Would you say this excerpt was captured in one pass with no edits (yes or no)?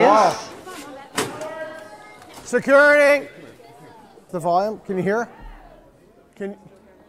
yes